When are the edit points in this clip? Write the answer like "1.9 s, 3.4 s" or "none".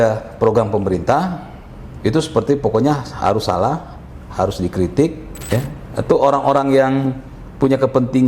5.3 s